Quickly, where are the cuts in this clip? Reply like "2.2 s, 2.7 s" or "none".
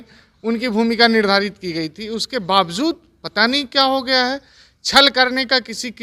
none